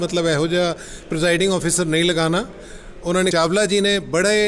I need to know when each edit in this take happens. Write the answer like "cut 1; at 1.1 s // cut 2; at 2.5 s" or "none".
cut 1; at 3.3 s